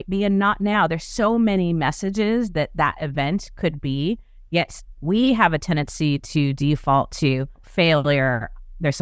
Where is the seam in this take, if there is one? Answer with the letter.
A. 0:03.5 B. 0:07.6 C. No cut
B